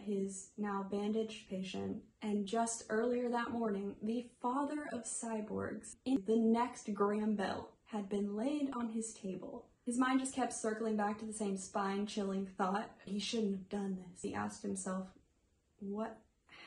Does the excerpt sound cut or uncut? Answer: cut